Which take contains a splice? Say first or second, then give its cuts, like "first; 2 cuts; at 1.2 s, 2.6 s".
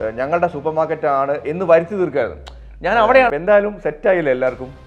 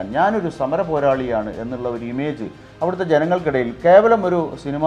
first; 1 cut; at 3.3 s